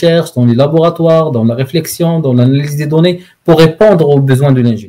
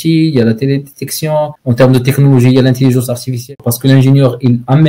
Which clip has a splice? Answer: second; 2 cuts; at 1.6 s, 3.5 s

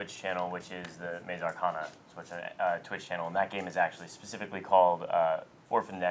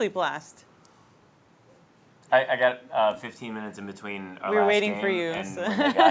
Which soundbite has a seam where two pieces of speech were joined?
second; 1 cut; at 2.3 s

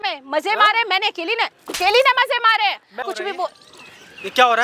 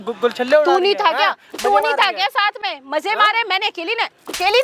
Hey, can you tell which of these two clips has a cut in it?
first; 1 cut; at 3.0 s

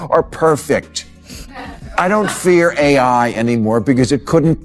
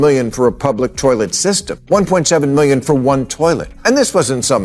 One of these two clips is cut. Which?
second; 2 cuts; at 1.7 s, 3.7 s

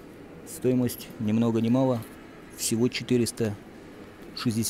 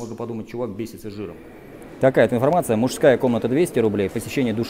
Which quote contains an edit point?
second; 1 cut; at 1.8 s

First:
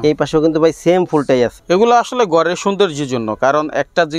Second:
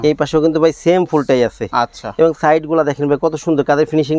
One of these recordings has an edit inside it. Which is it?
first; 1 cut; at 1.6 s

